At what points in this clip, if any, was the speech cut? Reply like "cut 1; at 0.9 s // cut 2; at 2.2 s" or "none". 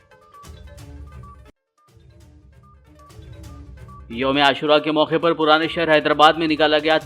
cut 1; at 1.0 s